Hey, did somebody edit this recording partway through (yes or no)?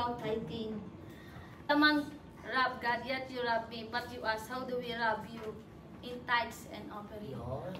yes